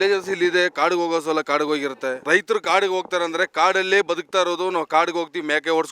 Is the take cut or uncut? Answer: cut